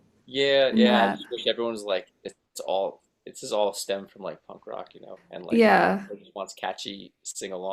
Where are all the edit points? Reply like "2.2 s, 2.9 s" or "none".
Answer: none